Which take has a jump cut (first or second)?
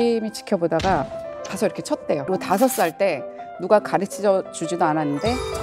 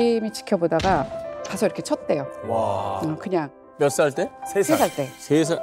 first